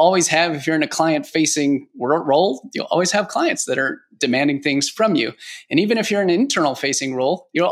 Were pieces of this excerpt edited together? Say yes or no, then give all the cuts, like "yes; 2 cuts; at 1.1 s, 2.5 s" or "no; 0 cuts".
no; 0 cuts